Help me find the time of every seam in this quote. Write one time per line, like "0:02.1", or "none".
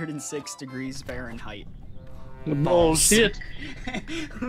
none